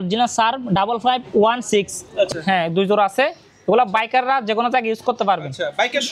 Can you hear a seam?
yes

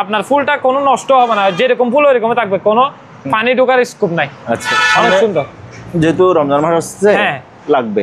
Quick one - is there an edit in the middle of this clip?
yes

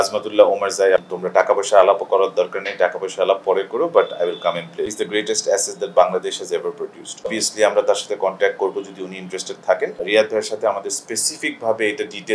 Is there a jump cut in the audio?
yes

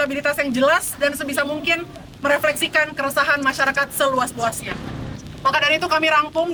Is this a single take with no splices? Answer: yes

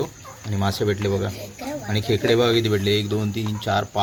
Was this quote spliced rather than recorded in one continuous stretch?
no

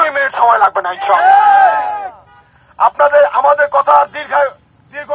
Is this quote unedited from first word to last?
yes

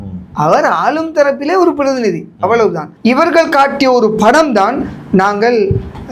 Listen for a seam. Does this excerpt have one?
yes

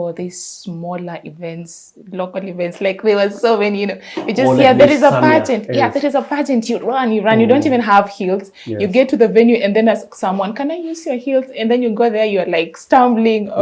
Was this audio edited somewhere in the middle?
no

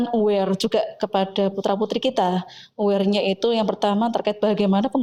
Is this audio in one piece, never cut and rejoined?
yes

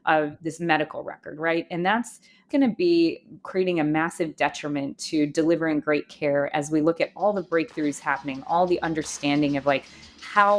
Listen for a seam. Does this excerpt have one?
no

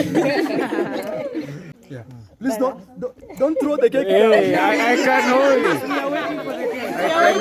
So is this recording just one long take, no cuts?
no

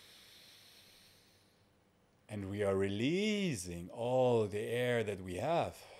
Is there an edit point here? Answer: no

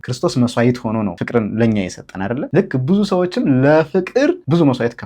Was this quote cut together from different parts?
yes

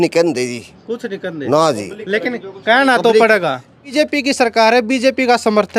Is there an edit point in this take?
yes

